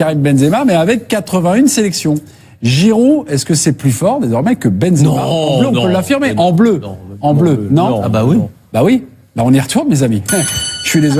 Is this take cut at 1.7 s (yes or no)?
no